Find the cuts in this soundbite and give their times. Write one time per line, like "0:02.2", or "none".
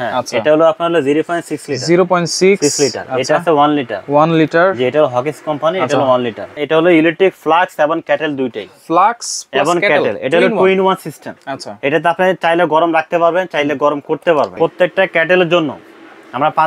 0:06.5
0:14.5

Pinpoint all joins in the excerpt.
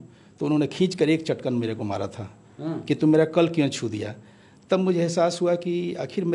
none

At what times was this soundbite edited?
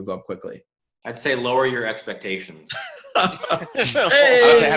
none

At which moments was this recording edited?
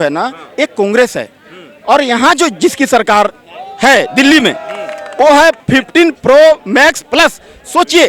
0:05.6

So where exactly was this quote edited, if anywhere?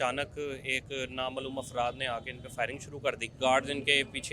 0:03.4

